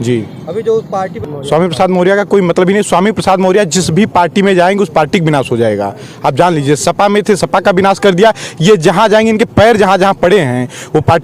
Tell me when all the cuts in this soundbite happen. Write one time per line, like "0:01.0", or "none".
0:01.2